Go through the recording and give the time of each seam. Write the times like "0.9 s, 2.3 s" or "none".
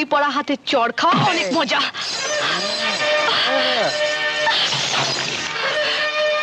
none